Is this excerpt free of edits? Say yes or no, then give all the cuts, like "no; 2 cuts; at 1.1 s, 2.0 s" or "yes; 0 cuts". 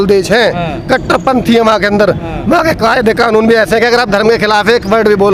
yes; 0 cuts